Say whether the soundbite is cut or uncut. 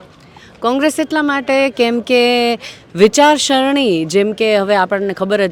uncut